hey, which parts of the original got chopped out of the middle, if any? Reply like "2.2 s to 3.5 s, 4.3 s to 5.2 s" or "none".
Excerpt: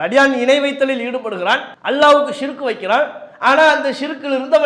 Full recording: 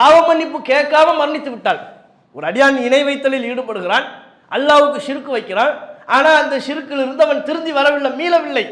4.2 s to 4.4 s